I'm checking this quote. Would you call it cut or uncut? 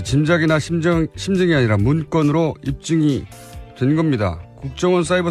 uncut